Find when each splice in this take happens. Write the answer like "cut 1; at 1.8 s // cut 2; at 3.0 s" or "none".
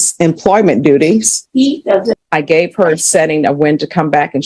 cut 1; at 2.2 s